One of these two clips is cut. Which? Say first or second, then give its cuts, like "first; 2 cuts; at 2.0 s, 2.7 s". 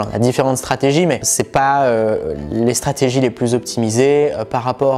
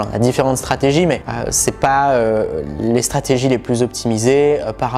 first; 1 cut; at 1.3 s